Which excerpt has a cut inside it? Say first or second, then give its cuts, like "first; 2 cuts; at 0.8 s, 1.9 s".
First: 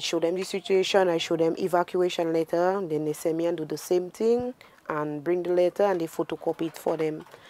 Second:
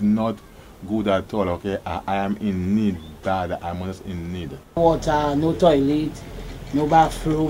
second; 1 cut; at 4.8 s